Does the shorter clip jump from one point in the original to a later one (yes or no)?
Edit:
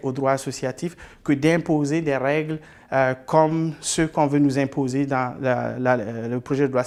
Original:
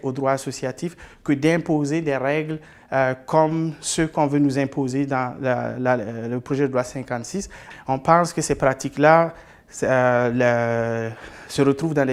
no